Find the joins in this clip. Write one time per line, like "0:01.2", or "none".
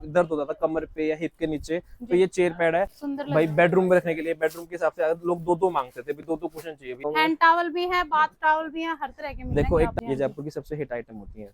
0:03.0
0:07.0
0:10.0